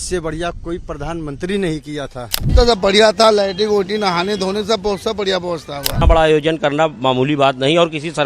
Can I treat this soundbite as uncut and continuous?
no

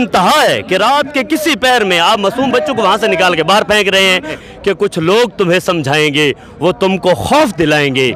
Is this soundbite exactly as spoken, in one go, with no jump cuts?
no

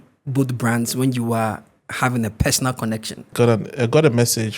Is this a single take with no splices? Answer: no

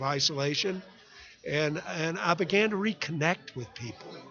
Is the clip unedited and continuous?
yes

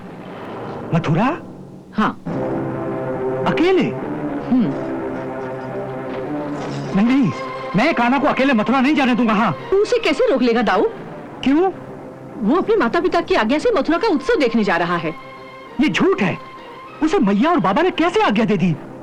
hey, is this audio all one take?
yes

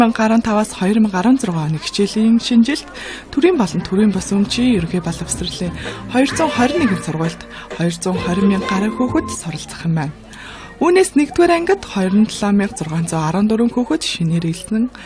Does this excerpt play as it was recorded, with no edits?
no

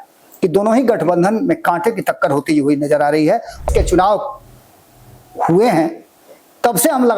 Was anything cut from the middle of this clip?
yes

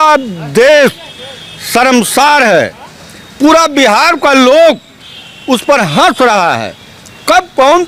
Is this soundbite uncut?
yes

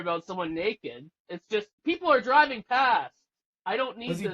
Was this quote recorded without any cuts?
no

